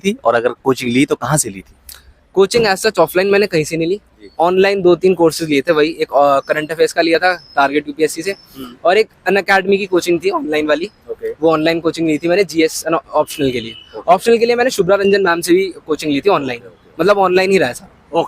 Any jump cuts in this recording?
no; 0 cuts

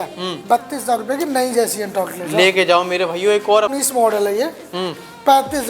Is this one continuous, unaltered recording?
no; 1 cut; at 3.8 s

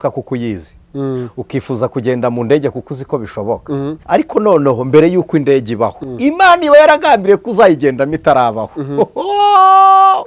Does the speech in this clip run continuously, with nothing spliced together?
no; 2 cuts; at 4.0 s, 6.0 s

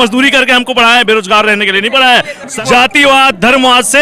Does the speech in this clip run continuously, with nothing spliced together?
no; 1 cut; at 2.5 s

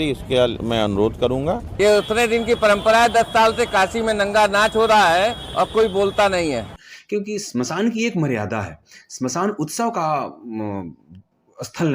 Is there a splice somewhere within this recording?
yes; 2 cuts; at 1.7 s, 7.4 s

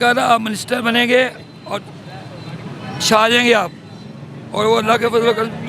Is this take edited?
no; 0 cuts

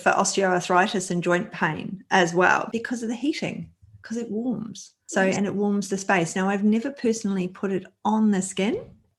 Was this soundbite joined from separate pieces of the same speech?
no; 0 cuts

